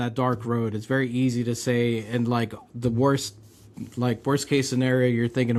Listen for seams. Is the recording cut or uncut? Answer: uncut